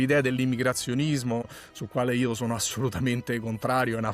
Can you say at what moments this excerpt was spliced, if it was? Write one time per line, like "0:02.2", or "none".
0:01.6